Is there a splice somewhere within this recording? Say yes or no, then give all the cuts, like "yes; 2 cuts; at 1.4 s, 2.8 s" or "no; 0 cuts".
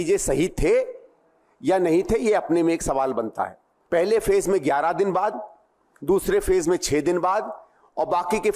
yes; 1 cut; at 3.8 s